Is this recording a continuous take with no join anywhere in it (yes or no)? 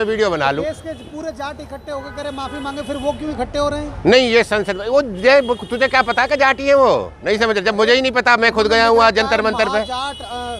yes